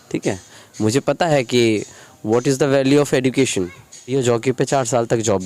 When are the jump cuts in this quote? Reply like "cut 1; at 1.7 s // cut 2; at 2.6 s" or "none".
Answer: cut 1; at 4.1 s